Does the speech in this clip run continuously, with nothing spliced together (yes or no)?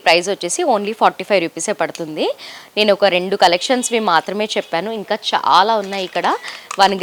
yes